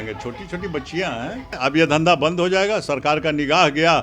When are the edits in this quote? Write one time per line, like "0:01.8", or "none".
0:01.6